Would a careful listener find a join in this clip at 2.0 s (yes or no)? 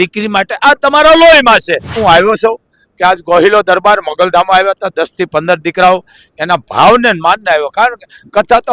yes